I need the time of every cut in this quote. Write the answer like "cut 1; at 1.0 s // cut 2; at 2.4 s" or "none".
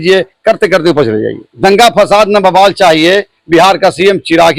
cut 1; at 1.4 s

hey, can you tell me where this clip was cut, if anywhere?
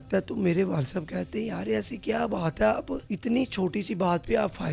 cut 1; at 3.0 s

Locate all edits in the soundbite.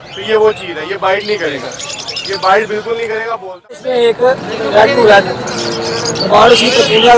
cut 1; at 3.9 s

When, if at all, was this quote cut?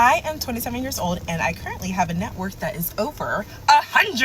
none

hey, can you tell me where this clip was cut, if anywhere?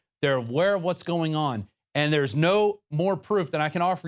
none

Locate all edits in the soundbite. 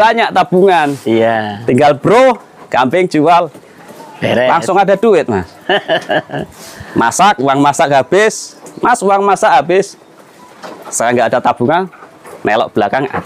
none

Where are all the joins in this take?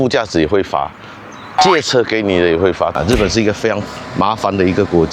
cut 1; at 2.9 s

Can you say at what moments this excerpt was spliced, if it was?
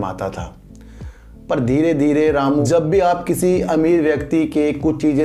cut 1; at 2.6 s

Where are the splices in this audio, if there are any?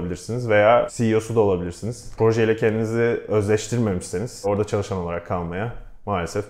cut 1; at 0.9 s // cut 2; at 2.1 s // cut 3; at 4.4 s

